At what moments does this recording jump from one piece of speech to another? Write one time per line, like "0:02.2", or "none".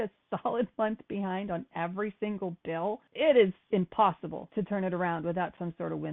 0:03.1
0:04.3